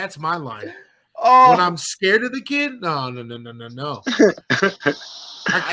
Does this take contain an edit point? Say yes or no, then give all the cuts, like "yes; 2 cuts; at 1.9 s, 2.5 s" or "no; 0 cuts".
no; 0 cuts